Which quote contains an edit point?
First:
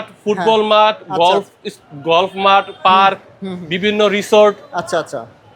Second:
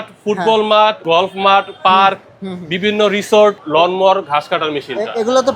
second; 2 cuts; at 1.0 s, 3.6 s

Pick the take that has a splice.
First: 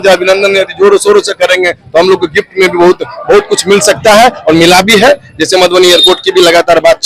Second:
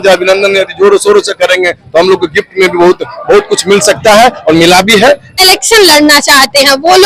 second; 1 cut; at 5.4 s

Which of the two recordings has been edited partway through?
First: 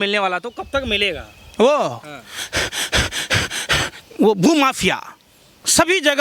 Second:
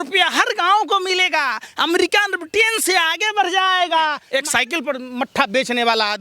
second; 1 cut; at 4.2 s

